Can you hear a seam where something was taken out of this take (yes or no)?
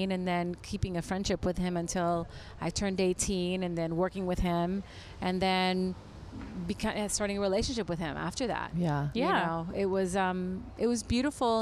no